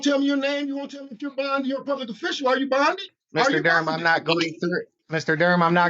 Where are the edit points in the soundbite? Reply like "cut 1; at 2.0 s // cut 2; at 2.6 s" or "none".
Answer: cut 1; at 3.1 s // cut 2; at 5.0 s